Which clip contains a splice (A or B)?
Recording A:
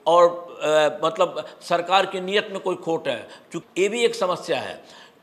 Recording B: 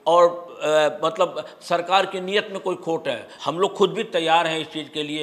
B